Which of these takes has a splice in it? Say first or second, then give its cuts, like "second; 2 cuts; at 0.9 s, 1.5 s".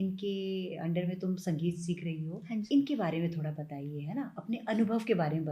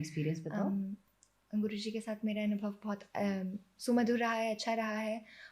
first; 1 cut; at 2.7 s